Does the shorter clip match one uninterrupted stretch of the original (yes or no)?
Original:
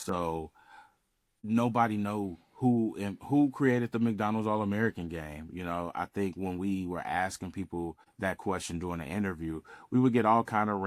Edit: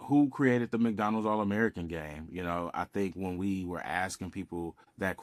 yes